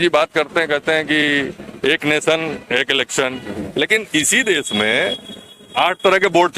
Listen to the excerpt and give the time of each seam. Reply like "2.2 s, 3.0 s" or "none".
3.5 s